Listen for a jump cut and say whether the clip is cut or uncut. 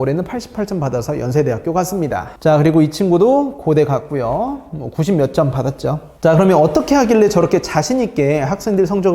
cut